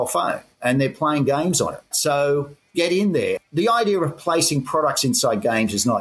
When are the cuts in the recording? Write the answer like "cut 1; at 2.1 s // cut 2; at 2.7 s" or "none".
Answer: cut 1; at 1.9 s // cut 2; at 2.6 s // cut 3; at 3.4 s

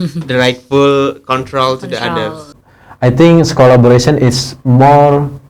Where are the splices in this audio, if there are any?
cut 1; at 2.6 s

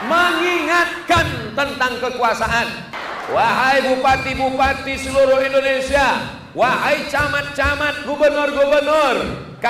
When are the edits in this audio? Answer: cut 1; at 2.9 s

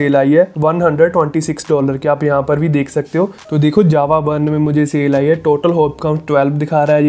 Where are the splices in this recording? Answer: cut 1; at 3.4 s

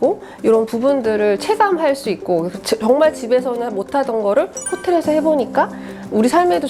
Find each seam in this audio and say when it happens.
none

